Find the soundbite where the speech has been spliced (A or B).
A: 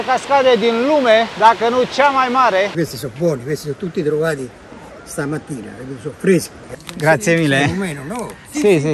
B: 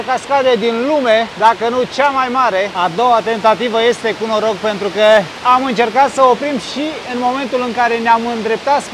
A